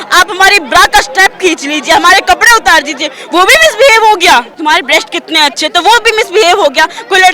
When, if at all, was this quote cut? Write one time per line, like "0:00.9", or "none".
0:04.5